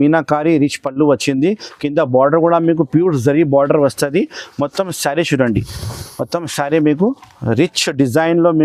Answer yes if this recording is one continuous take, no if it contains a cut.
yes